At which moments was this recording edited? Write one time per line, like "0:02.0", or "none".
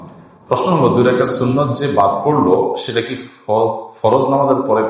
none